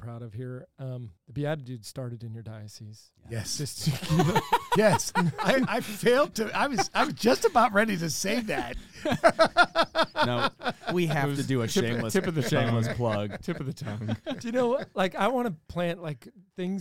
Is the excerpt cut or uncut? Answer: cut